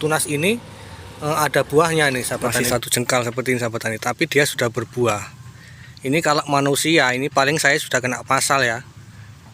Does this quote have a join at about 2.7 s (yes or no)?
yes